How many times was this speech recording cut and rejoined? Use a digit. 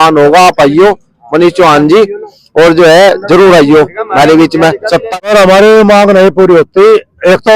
1